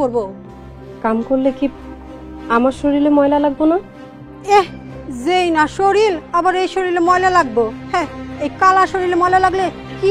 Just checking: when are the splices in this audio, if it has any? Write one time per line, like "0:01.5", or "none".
none